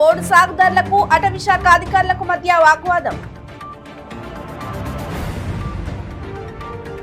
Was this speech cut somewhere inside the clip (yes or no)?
no